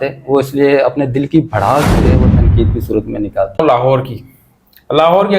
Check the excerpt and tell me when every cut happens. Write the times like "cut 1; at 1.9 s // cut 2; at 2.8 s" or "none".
cut 1; at 3.6 s